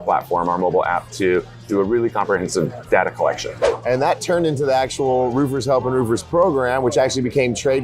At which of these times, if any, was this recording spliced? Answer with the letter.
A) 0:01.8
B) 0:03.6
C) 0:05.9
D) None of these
B